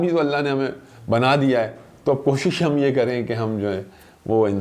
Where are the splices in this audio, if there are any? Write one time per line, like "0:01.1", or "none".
none